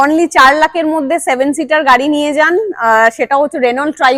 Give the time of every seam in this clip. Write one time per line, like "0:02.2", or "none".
none